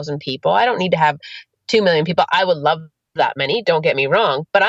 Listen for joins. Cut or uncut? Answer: cut